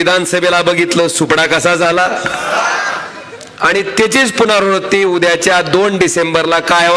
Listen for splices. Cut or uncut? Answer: uncut